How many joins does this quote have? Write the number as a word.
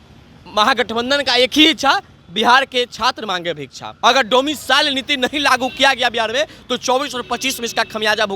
one